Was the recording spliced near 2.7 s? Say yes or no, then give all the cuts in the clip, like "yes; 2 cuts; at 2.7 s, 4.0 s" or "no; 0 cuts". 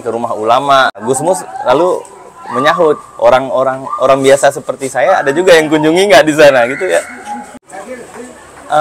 no; 2 cuts; at 1.0 s, 7.6 s